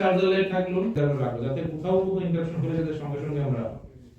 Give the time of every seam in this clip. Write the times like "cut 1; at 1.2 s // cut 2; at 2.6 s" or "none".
cut 1; at 1.0 s